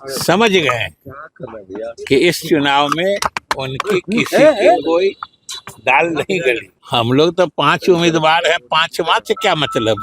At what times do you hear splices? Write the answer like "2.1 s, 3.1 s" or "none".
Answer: 6.7 s